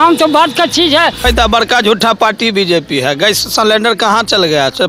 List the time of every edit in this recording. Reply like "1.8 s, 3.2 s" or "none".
1.2 s

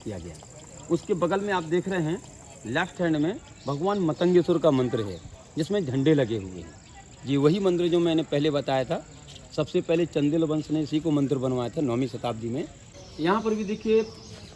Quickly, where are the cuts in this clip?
12.8 s

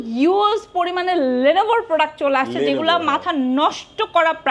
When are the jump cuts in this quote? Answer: none

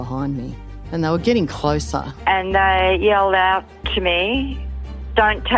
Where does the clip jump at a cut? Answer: none

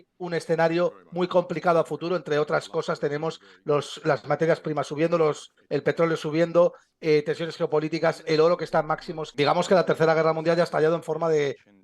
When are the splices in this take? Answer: 9.2 s

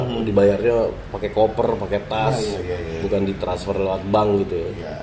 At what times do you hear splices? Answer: none

